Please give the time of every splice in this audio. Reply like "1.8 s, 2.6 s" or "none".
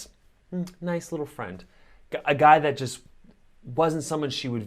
2.9 s